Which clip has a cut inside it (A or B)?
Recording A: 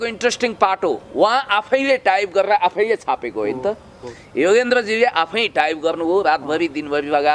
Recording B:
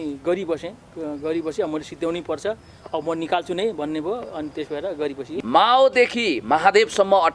B